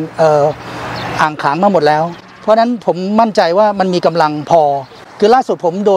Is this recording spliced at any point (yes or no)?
yes